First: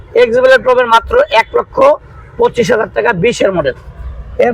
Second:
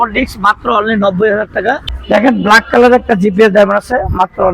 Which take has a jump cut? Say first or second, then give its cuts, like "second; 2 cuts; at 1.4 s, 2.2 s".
second; 1 cut; at 1.9 s